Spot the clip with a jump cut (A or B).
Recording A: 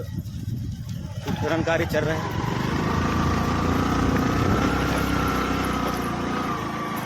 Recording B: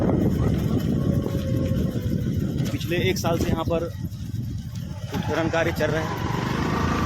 A